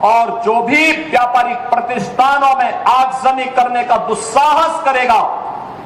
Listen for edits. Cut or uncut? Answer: uncut